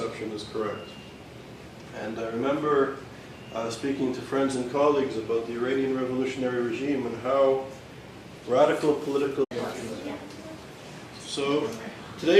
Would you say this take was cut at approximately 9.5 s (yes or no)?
no